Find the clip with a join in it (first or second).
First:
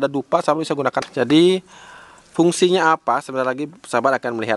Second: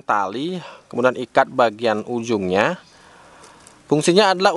first